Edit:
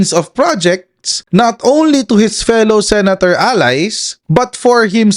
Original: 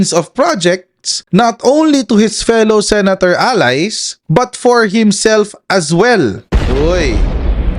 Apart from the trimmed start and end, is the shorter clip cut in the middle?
no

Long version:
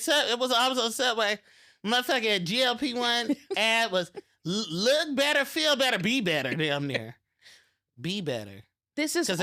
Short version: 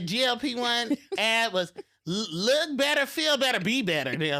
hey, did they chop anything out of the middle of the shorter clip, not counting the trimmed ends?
no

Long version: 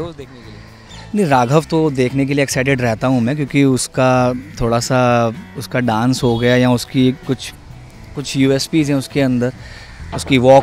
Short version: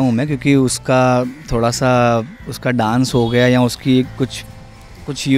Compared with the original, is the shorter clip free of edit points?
yes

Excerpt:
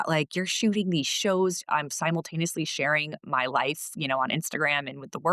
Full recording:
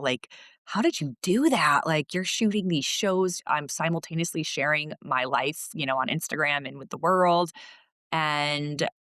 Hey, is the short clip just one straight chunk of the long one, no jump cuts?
yes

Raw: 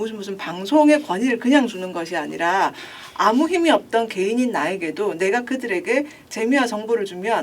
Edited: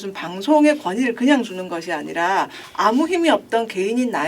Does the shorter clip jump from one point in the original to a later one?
yes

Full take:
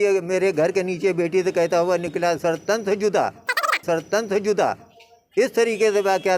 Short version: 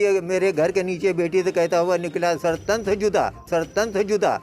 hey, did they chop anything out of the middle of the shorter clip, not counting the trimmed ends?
yes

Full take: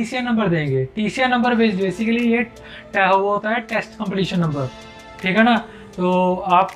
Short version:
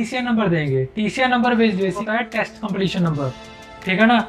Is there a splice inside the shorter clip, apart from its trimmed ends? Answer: yes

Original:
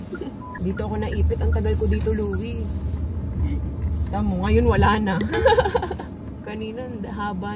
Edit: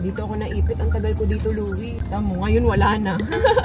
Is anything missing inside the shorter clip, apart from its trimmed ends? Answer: yes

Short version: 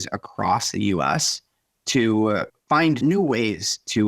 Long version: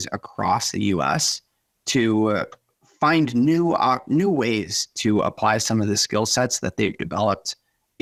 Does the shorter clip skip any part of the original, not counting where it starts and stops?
yes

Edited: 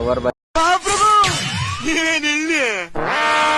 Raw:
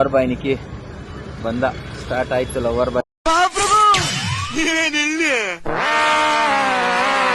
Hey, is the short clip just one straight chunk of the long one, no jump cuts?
yes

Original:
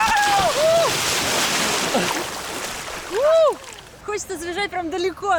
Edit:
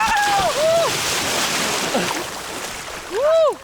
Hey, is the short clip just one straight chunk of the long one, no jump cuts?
yes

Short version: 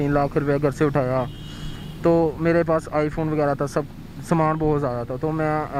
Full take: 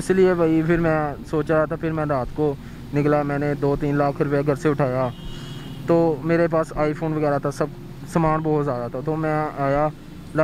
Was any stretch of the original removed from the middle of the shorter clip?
no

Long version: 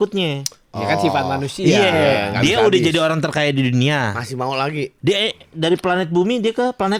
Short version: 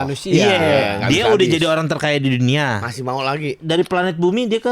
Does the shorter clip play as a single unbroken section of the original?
no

